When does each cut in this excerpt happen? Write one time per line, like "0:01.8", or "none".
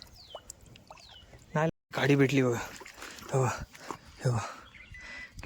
0:01.7